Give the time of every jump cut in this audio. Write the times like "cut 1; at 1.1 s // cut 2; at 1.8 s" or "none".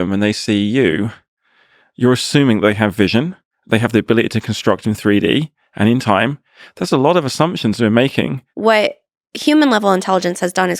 cut 1; at 8.5 s